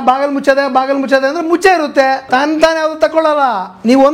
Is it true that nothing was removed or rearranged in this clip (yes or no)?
no